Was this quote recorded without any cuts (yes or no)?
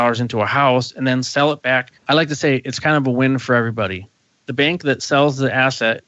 no